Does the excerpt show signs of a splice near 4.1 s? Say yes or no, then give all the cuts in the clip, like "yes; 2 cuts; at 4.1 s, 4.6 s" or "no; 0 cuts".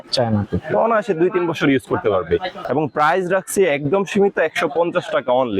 no; 1 cut; at 2.6 s